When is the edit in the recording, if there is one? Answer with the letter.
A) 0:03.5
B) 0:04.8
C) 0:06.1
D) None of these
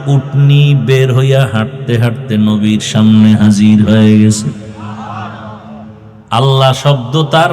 C